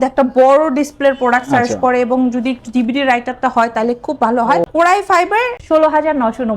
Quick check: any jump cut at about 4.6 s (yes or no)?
yes